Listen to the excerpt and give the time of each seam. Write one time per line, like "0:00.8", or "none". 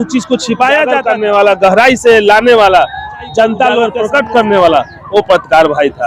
0:01.1
0:03.9